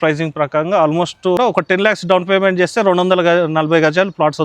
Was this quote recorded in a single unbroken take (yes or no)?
no